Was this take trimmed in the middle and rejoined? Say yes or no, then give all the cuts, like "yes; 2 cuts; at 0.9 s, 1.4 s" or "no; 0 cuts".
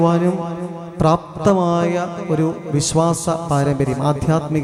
no; 0 cuts